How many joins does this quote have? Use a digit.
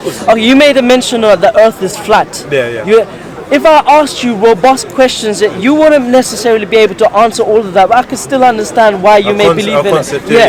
0